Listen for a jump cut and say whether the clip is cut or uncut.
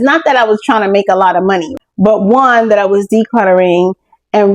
cut